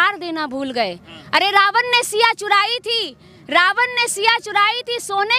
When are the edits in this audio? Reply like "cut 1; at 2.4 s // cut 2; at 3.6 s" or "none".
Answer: none